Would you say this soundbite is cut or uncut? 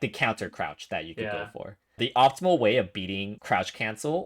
cut